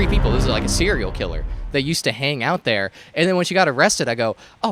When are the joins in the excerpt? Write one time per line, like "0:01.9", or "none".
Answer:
none